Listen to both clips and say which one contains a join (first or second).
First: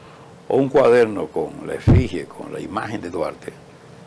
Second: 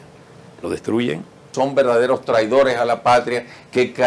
second